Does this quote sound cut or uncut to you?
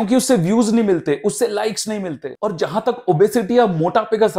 cut